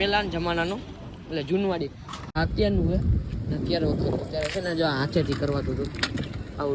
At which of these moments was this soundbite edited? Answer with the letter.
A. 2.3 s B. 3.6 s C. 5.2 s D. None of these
A